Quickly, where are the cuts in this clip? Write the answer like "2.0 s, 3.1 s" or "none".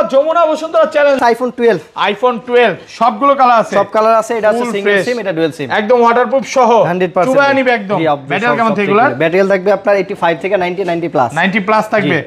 1.2 s